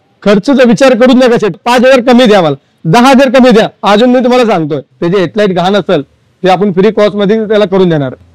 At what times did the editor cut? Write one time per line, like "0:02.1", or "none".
0:01.6
0:04.9